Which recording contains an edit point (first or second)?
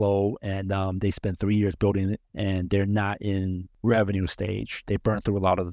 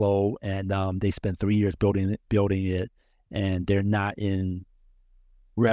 first